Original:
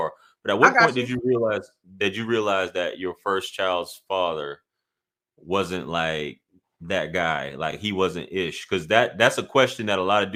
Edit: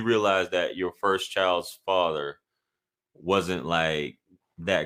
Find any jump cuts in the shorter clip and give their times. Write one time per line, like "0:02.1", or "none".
none

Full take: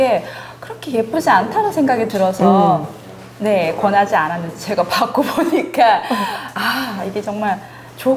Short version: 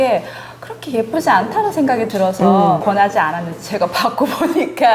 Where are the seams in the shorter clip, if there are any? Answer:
0:02.8

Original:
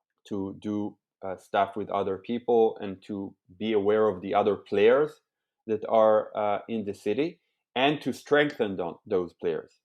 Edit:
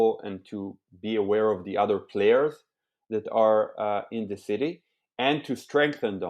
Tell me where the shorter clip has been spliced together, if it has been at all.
none

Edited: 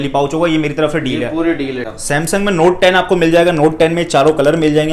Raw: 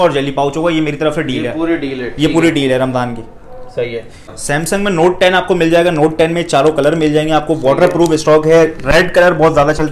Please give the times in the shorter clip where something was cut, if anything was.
0:01.8

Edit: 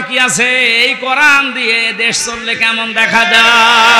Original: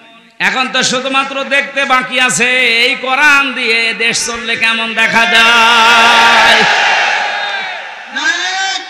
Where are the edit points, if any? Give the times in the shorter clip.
none

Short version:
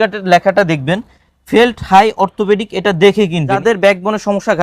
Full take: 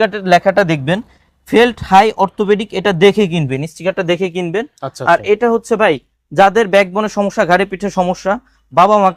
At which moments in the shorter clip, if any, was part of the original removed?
0:03.6

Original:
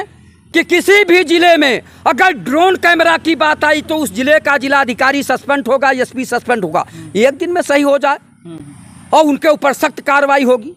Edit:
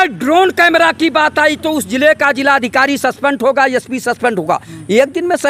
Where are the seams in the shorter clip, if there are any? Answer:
none

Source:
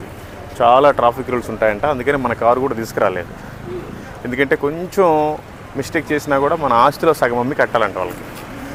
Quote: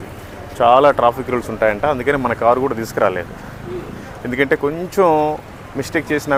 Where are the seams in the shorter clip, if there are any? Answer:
none

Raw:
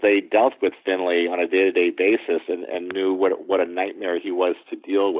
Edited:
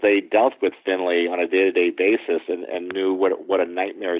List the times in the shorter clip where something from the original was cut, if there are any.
none

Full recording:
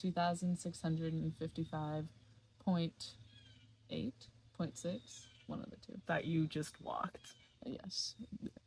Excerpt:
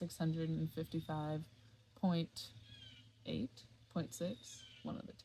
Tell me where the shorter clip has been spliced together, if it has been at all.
none

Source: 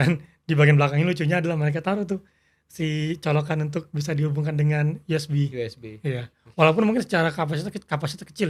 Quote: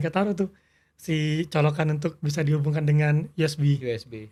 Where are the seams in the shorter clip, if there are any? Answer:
none

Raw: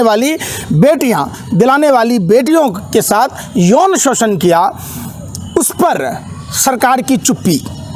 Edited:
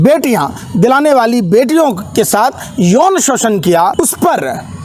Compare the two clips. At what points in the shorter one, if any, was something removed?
0:03.9

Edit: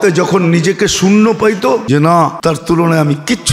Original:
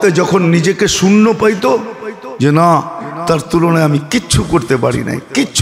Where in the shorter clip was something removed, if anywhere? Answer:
0:01.8
0:02.4

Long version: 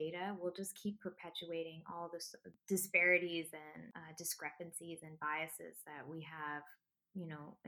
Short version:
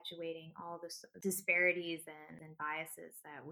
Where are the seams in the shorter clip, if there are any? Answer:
0:01.1
0:02.4

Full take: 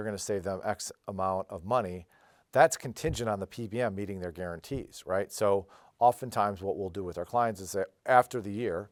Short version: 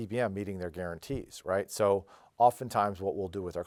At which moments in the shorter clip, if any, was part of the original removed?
none

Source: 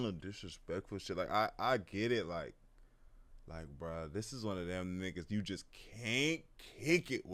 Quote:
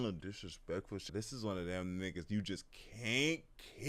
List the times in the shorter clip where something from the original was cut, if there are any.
0:01.0

